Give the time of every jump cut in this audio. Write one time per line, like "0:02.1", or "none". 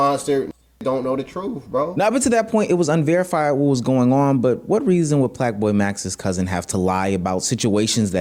none